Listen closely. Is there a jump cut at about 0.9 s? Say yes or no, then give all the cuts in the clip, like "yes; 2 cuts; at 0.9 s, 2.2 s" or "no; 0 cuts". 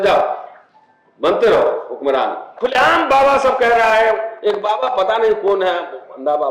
no; 1 cut; at 2.5 s